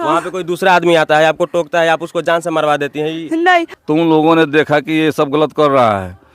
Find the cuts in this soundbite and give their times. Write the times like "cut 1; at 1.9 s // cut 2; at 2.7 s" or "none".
cut 1; at 3.7 s